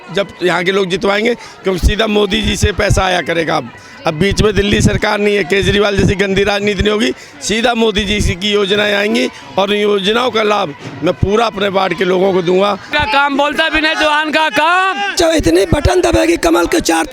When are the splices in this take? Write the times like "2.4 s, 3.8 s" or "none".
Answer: 12.9 s, 15.2 s